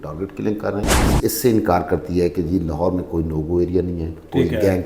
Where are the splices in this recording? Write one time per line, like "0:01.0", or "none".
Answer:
0:01.1